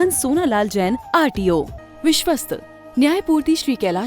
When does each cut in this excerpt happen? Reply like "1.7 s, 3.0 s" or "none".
1.8 s